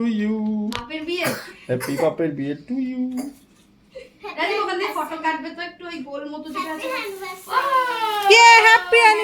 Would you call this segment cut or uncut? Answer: uncut